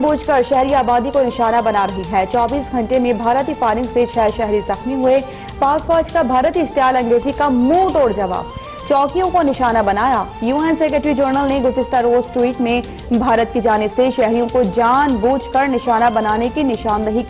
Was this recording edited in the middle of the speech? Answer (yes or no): no